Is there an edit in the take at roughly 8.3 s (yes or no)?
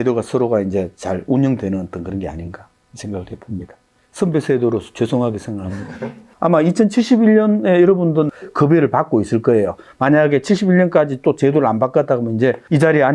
yes